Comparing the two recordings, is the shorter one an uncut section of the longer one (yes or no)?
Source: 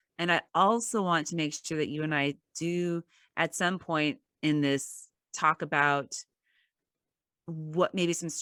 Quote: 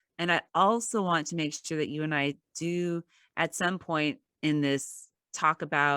yes